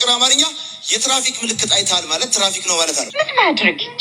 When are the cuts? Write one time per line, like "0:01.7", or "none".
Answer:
0:03.1